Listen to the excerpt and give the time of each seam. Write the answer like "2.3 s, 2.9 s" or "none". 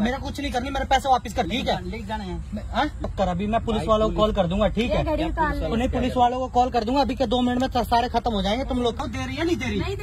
1.5 s, 3.1 s, 8.9 s